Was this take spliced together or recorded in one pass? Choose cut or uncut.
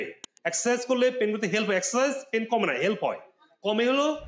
uncut